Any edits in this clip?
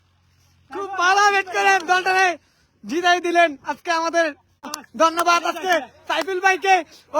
yes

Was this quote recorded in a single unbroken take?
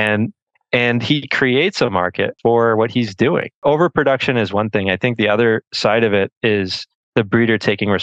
no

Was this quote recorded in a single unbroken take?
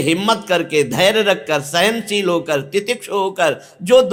yes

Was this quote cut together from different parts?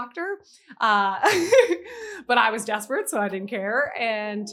no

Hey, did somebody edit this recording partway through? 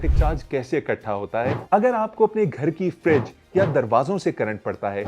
yes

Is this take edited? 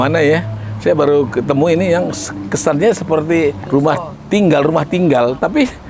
yes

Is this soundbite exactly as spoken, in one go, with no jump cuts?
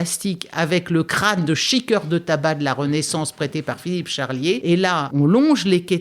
no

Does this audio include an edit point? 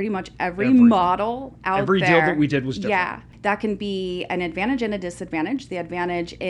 yes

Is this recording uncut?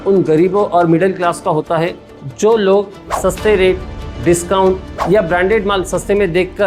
yes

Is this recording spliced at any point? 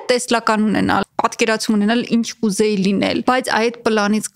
yes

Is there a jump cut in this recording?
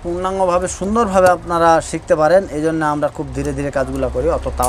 no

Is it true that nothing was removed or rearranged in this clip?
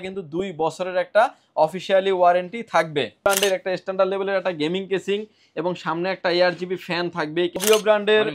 no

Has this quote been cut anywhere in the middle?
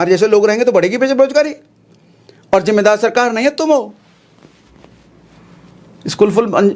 no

